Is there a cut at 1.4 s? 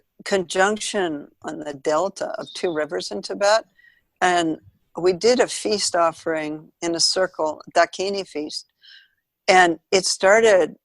yes; 1 cut; at 1.4 s

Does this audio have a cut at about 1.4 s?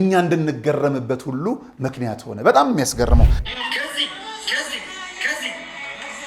no; 1 cut; at 3.3 s

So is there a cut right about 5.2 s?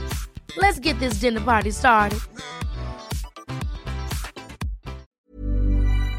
yes; 1 cut; at 5.2 s

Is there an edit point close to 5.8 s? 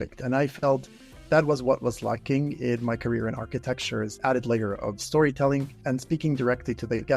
yes; 2 cuts; at 4.1 s, 5.8 s

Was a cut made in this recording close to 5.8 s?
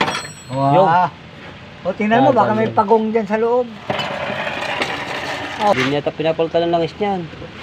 yes; 1 cut; at 5.8 s

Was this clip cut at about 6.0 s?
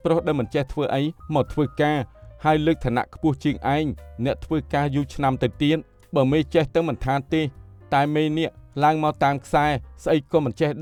no; 0 cuts

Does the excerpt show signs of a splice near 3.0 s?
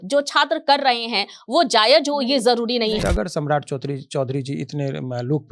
yes; 1 cut; at 3.0 s

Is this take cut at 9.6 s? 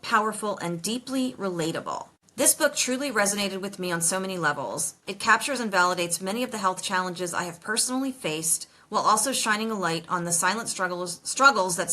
no; 1 cut; at 2.2 s

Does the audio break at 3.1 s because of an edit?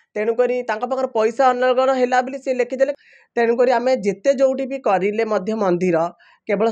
yes; 1 cut; at 3.1 s

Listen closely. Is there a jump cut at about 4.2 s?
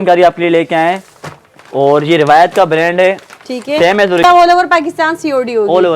yes; 1 cut; at 4.2 s

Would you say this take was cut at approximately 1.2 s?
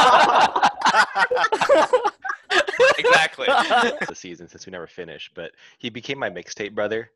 no; 1 cut; at 4.1 s

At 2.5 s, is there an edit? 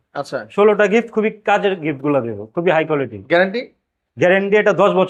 no; 0 cuts

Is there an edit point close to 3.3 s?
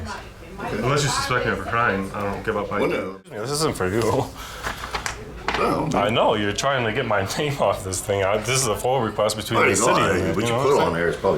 yes; 1 cut; at 3.3 s

